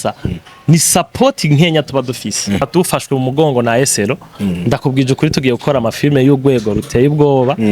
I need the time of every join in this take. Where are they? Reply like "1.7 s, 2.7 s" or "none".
2.6 s

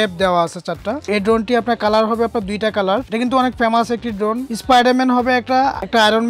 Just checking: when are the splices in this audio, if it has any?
1.1 s, 4.4 s

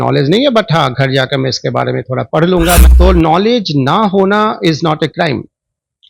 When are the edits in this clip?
2.9 s

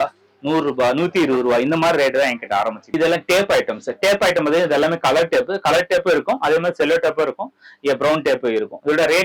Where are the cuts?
2.8 s

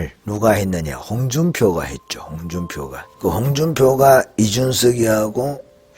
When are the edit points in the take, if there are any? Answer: 3.0 s

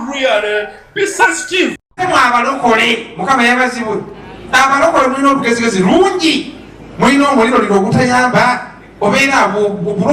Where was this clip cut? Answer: 2.0 s

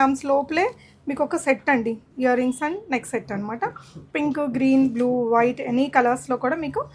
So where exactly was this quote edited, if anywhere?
none

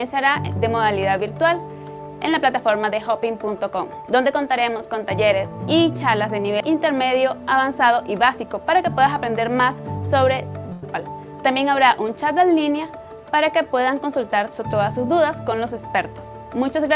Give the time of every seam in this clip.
none

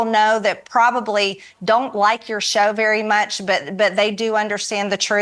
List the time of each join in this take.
none

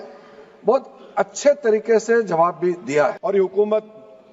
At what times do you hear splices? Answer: 3.2 s

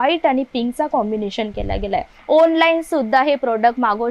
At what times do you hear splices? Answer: 2.1 s

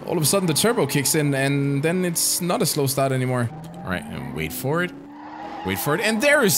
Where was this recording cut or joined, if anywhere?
3.6 s

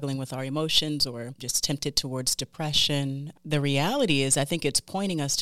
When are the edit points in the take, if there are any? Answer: 1.5 s, 3.3 s

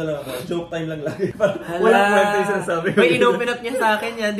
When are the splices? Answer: none

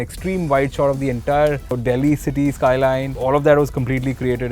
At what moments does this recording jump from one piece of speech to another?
1.7 s, 3.1 s

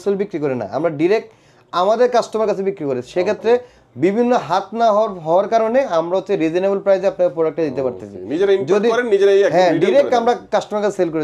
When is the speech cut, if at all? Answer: none

